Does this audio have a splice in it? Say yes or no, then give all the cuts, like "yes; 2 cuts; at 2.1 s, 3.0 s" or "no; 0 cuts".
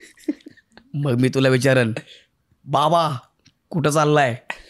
no; 0 cuts